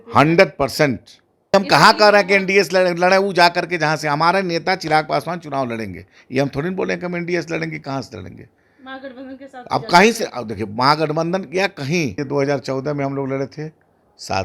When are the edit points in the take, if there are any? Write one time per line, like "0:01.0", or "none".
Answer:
0:01.5
0:12.2